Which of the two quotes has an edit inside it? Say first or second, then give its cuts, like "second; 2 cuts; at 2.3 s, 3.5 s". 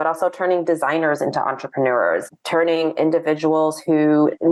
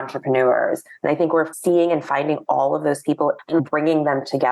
second; 1 cut; at 3.4 s